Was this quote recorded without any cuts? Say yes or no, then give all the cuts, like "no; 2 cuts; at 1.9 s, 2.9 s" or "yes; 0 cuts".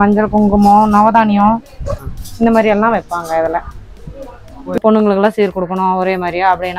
no; 1 cut; at 4.8 s